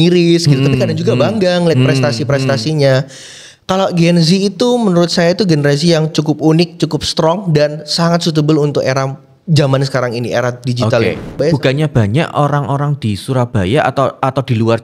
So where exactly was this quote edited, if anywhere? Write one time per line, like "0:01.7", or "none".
0:11.4